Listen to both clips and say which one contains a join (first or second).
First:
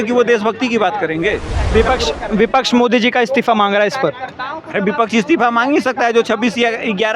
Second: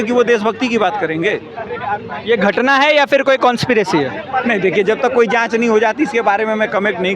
first